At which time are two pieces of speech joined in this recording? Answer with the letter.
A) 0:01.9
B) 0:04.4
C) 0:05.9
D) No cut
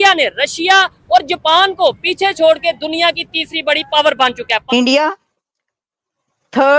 B